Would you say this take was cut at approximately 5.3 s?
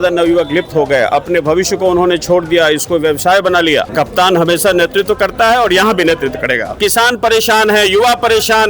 no; 2 cuts; at 3.9 s, 6.7 s

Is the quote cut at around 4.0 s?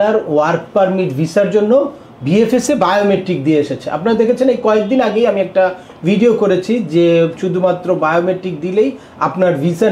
no; 0 cuts

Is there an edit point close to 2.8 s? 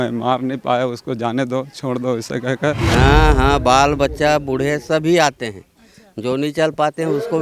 yes; 1 cut; at 2.8 s

